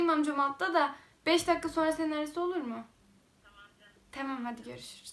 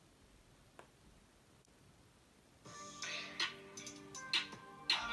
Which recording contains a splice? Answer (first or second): second